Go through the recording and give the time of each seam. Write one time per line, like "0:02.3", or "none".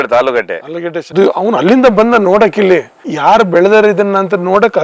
0:01.0

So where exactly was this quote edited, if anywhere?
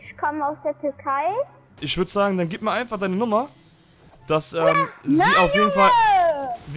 0:01.8

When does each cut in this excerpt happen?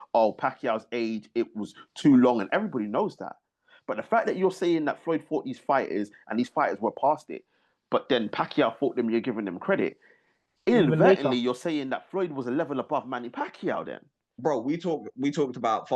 0:14.4

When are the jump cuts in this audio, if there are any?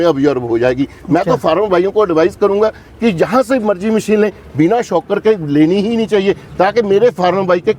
none

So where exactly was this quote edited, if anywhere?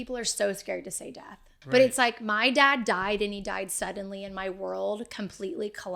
0:01.5

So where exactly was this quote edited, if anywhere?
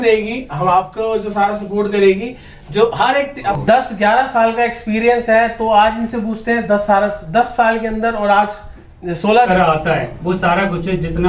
0:03.6
0:09.5

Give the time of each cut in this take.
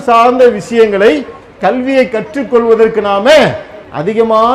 none

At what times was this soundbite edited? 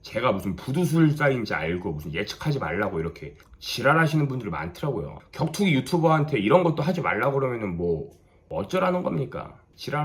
none

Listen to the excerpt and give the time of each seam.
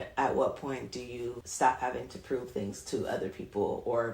0:01.4

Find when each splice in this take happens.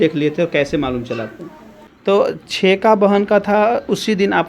0:01.9

